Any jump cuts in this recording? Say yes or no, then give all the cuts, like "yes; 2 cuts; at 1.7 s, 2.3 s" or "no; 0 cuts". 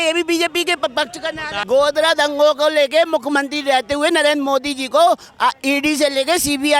yes; 1 cut; at 1.5 s